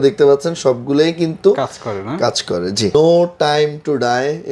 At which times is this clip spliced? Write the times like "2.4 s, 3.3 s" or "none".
2.9 s